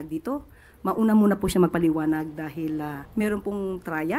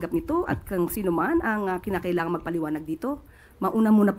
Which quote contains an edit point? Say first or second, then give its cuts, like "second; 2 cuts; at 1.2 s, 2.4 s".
first; 1 cut; at 3.0 s